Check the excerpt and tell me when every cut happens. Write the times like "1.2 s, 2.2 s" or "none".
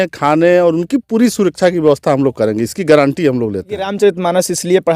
3.9 s